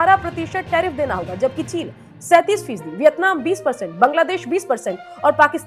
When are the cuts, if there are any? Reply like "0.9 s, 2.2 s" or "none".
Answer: none